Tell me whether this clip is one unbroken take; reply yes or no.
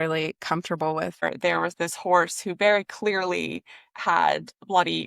no